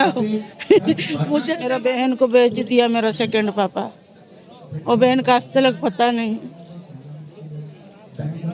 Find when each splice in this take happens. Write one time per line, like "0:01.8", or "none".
0:01.5